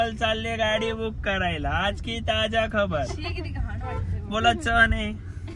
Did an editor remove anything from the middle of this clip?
no; 0 cuts

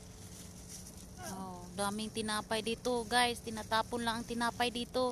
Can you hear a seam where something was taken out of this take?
no; 0 cuts

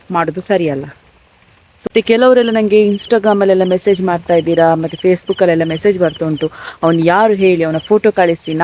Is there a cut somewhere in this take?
yes; 1 cut; at 1.9 s

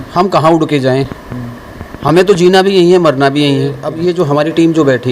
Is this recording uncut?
no; 1 cut; at 3.8 s

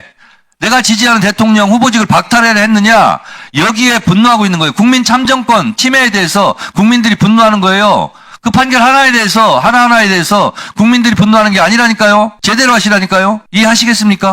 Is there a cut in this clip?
yes; 2 cuts; at 12.4 s, 13.4 s

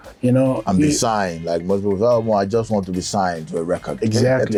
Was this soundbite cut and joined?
no; 0 cuts

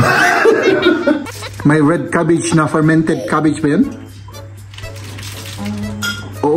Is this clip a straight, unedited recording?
no; 1 cut; at 1.4 s

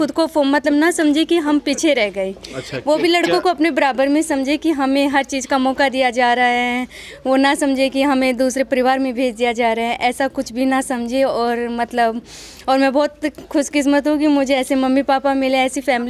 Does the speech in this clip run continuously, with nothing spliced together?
yes; 0 cuts

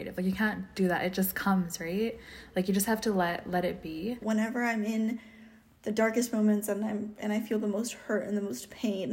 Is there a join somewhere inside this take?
yes; 1 cut; at 4.2 s

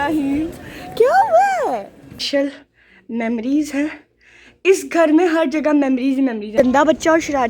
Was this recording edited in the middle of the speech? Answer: yes; 2 cuts; at 2.2 s, 6.5 s

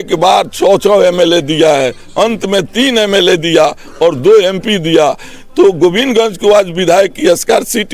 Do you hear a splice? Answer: no; 0 cuts

